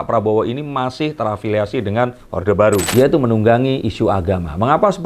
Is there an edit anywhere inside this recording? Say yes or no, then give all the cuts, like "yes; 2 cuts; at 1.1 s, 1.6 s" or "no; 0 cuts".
yes; 1 cut; at 2.9 s